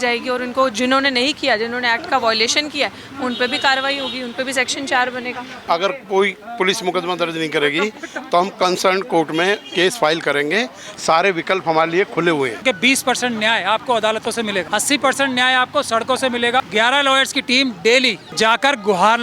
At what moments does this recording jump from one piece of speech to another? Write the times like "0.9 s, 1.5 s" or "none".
5.6 s, 12.6 s, 14.7 s, 16.7 s, 18.2 s

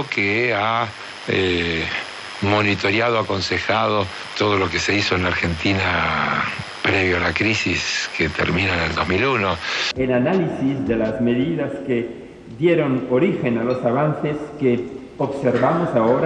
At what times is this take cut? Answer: 9.8 s

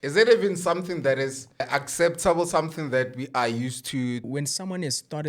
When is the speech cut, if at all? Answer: 1.6 s, 4.3 s

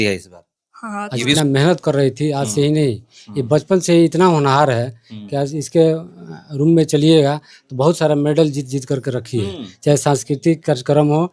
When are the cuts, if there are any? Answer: 1.4 s

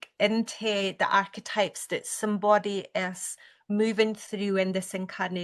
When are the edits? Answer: none

